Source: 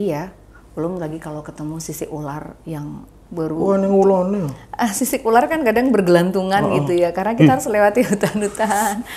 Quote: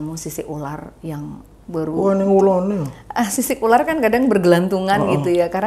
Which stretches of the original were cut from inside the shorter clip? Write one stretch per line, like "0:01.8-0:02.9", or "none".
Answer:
none